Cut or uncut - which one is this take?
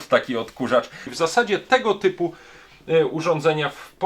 cut